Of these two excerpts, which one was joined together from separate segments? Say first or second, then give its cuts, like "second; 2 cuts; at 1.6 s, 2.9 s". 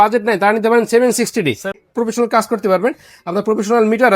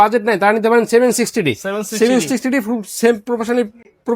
first; 1 cut; at 1.8 s